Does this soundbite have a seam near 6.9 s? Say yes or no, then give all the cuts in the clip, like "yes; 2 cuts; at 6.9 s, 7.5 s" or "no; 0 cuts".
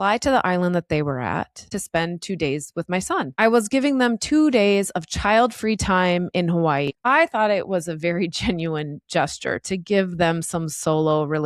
yes; 3 cuts; at 1.7 s, 3.3 s, 6.9 s